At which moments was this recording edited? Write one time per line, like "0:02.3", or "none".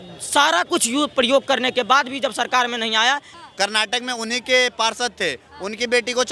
0:03.3